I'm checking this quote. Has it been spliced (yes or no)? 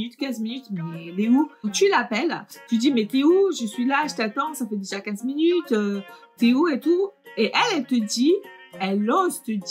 yes